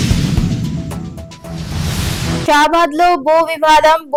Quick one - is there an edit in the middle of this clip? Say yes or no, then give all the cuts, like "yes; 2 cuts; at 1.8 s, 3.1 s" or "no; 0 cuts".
no; 0 cuts